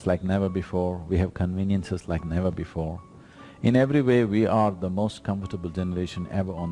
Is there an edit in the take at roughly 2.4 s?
no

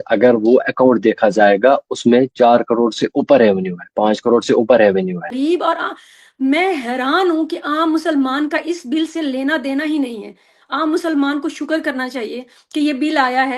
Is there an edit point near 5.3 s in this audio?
yes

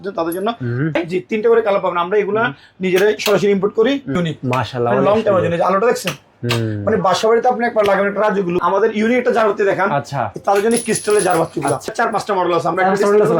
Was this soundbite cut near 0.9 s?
yes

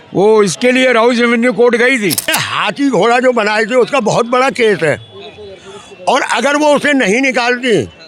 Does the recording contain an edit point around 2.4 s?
yes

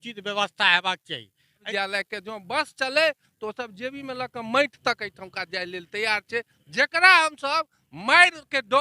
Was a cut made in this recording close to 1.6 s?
yes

